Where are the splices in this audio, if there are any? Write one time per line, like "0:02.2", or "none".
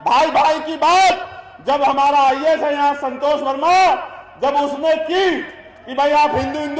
none